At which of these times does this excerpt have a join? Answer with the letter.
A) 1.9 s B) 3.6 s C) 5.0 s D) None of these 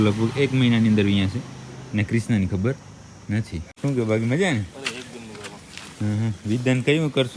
B